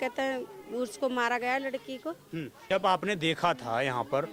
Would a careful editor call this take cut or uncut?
uncut